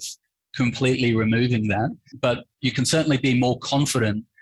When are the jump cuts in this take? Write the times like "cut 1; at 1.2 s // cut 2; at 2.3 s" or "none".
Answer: cut 1; at 2.0 s